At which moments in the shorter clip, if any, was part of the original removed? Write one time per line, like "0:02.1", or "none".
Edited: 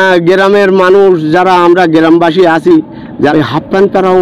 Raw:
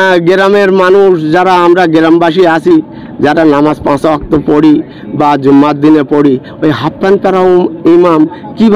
0:03.3